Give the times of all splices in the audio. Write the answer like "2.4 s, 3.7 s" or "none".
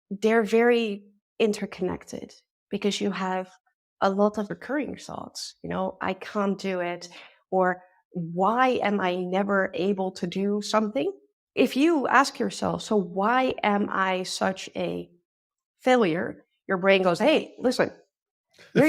4.5 s, 11.3 s